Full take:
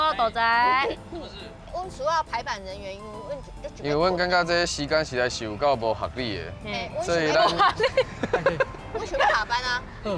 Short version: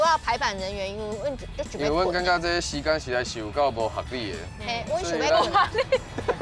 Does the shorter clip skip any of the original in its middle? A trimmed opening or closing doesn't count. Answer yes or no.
no